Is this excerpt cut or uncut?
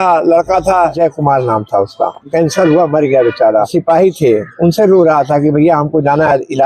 cut